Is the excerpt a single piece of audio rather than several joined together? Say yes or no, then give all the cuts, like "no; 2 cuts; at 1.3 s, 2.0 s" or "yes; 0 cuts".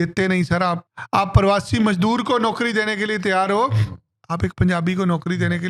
no; 1 cut; at 0.9 s